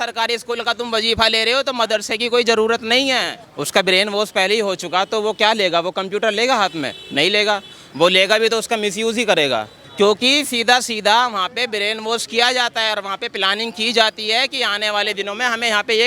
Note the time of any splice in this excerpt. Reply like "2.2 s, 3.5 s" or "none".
3.4 s, 9.8 s